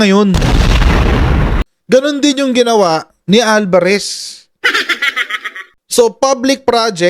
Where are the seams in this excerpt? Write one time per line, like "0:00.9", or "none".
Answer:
0:01.9
0:03.1